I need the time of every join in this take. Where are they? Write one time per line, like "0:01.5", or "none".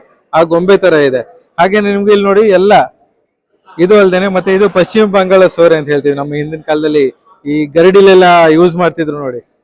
none